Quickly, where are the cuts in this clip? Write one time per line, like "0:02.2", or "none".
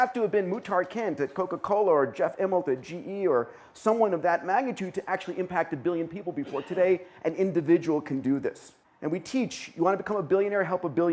none